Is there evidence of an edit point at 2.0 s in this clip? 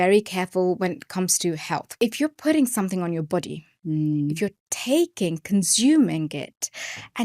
yes; 1 cut; at 2.0 s

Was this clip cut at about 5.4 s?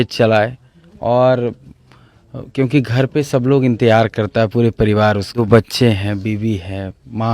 yes; 1 cut; at 5.4 s

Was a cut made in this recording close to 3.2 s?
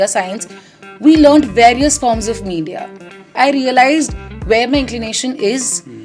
yes; 1 cut; at 3.2 s

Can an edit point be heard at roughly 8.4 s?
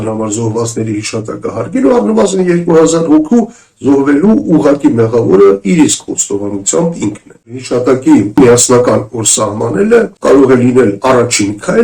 yes; 3 cuts; at 7.5 s, 8.4 s, 10.1 s

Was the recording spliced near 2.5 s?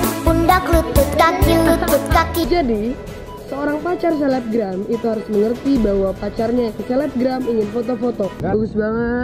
yes; 2 cuts; at 2.5 s, 8.4 s

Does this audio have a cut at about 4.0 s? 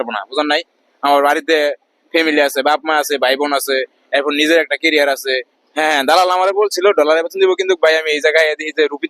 no; 1 cut; at 5.6 s

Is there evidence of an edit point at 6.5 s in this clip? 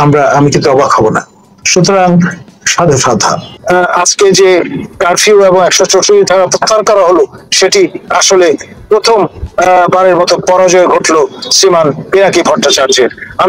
no; 1 cut; at 3.5 s

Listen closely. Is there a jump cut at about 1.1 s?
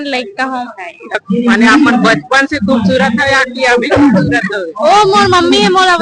yes; 1 cut; at 1.1 s

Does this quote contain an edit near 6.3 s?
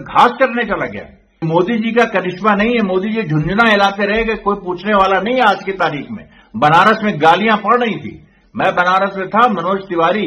no; 1 cut; at 1.5 s

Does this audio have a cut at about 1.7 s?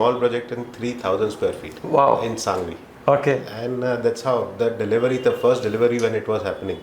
yes; 1 cut; at 1.7 s

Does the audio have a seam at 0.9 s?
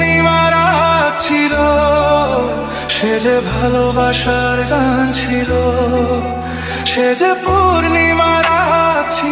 no; 0 cuts

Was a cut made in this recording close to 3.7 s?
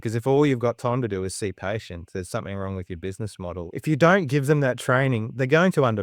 yes; 2 cuts; at 3.7 s, 5.3 s

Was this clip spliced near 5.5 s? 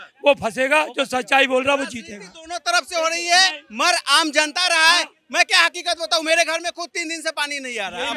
no; 0 cuts

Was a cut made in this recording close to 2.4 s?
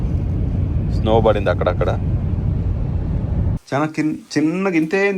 no; 1 cut; at 3.6 s

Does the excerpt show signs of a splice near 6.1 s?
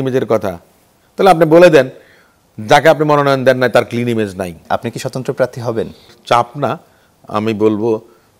yes; 2 cuts; at 4.5 s, 6.1 s

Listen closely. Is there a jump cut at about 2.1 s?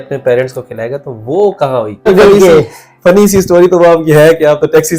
yes; 1 cut; at 2.1 s

